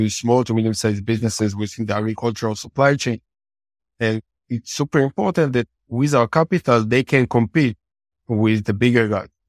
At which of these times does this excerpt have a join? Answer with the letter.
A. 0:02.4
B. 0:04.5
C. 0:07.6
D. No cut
D